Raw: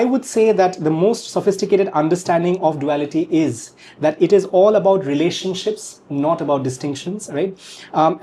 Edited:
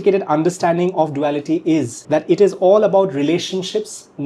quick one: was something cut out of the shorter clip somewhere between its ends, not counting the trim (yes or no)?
yes